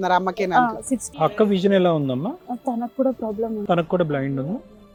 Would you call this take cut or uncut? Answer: uncut